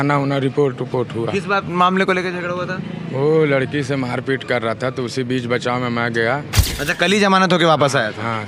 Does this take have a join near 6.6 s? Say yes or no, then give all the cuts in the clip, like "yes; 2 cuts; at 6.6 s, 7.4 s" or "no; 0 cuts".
yes; 1 cut; at 6.6 s